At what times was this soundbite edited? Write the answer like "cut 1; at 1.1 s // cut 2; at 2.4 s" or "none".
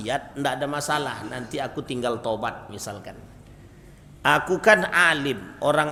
none